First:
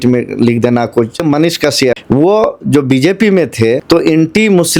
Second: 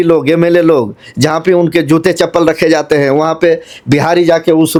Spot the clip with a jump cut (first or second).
first